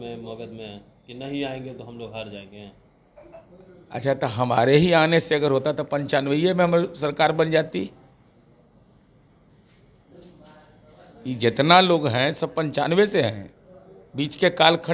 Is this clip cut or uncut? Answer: uncut